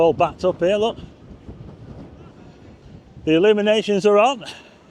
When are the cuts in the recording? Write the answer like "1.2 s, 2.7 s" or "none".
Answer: 2.8 s